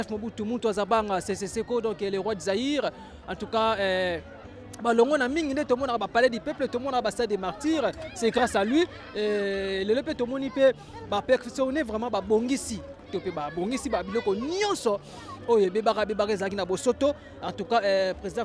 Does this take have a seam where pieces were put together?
no; 0 cuts

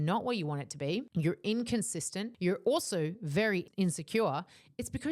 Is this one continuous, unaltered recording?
no; 3 cuts; at 1.1 s, 2.2 s, 3.6 s

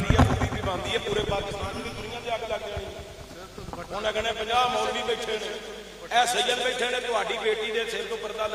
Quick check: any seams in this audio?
no; 0 cuts

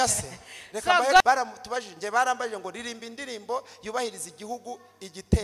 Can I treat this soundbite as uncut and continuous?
no; 1 cut; at 1.2 s

